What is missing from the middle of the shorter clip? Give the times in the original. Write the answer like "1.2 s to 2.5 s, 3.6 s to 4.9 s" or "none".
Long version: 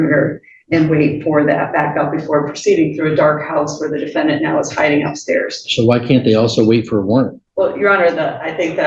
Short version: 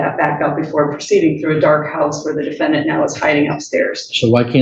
none